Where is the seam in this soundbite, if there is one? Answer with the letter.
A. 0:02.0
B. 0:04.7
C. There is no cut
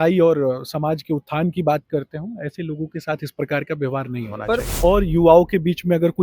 B